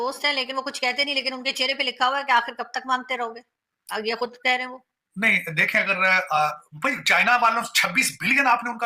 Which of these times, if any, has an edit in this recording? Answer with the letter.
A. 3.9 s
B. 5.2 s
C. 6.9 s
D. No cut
D